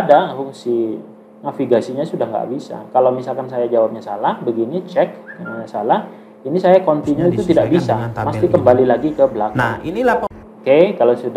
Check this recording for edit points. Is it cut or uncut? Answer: cut